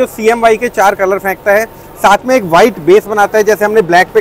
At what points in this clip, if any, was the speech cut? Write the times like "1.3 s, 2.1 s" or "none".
none